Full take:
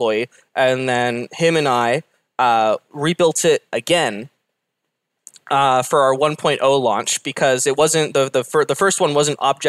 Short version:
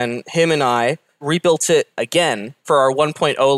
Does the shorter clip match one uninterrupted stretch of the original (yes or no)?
no